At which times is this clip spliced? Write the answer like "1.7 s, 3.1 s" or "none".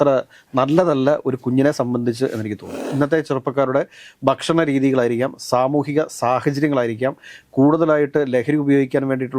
2.8 s